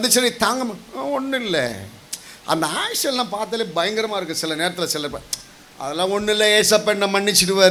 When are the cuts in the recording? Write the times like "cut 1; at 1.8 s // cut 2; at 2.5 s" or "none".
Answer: none